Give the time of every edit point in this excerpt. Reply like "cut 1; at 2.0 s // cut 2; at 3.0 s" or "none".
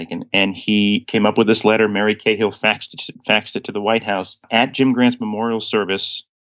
cut 1; at 1.0 s // cut 2; at 4.5 s